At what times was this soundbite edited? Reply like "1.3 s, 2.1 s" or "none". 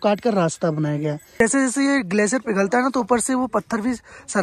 1.4 s